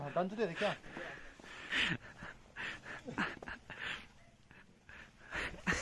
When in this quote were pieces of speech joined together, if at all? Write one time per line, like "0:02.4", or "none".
0:01.7